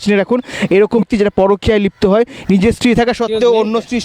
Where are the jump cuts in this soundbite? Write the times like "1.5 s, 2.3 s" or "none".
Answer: 1.0 s